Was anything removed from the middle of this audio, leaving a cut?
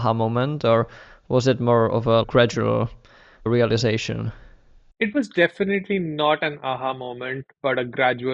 yes; 3 cuts; at 2.2 s, 3.4 s, 4.8 s

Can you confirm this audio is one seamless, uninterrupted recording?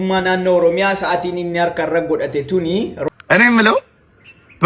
no; 1 cut; at 3.0 s

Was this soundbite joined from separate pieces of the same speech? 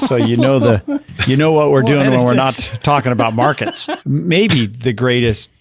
yes; 1 cut; at 3.9 s

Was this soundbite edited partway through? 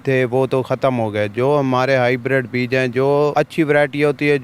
yes; 1 cut; at 3.3 s

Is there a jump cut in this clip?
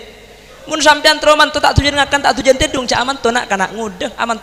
no; 0 cuts

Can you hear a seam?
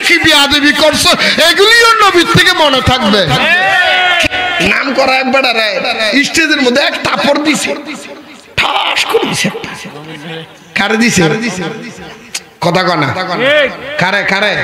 yes; 1 cut; at 4.3 s

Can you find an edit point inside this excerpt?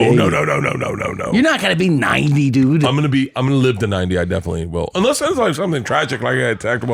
no; 0 cuts

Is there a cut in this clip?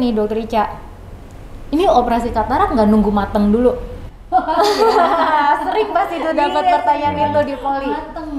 no; 0 cuts

